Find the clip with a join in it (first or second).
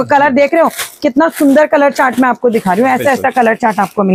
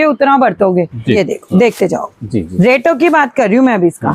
second